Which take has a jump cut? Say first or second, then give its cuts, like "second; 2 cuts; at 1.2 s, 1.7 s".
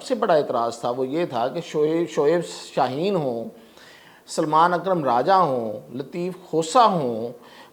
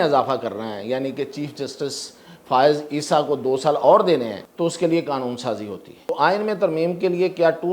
second; 2 cuts; at 4.4 s, 6.1 s